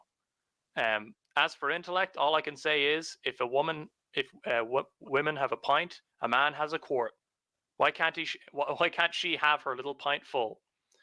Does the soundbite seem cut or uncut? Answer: uncut